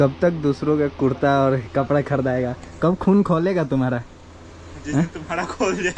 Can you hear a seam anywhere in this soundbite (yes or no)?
no